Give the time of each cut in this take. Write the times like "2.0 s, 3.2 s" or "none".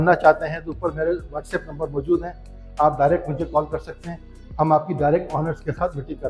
none